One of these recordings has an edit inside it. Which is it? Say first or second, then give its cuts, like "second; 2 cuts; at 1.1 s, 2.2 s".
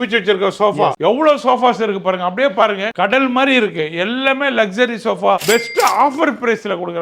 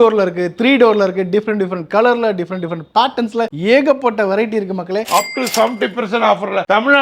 second; 1 cut; at 5.1 s